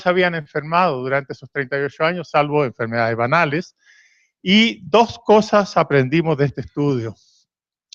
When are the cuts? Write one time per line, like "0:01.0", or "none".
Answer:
0:02.5